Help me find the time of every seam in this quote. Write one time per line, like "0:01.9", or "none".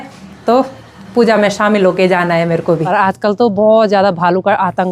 0:02.8